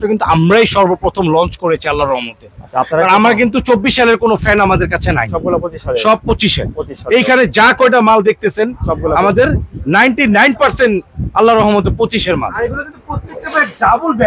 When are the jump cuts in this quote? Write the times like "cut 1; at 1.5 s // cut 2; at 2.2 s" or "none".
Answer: cut 1; at 12.7 s